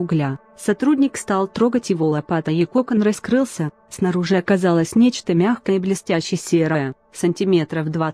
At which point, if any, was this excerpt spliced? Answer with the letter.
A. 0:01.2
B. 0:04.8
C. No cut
A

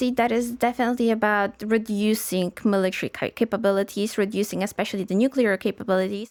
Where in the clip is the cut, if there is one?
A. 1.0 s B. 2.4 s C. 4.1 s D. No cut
D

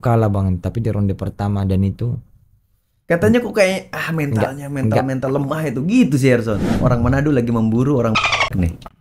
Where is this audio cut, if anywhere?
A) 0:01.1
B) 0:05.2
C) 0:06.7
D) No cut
C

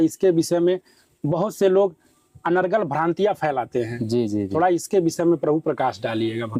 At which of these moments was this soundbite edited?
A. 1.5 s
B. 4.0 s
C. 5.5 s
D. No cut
D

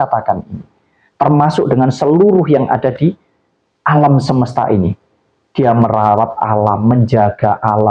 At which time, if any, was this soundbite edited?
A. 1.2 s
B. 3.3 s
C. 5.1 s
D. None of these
D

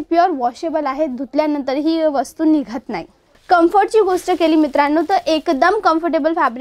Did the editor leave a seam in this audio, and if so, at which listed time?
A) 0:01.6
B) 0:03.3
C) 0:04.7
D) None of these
B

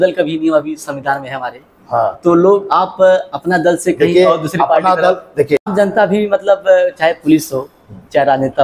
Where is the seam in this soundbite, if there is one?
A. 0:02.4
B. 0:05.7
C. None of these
B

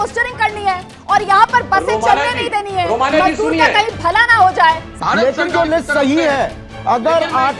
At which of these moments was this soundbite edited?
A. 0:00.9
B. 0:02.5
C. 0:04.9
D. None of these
C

